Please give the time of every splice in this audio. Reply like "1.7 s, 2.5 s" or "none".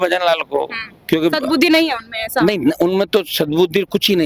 none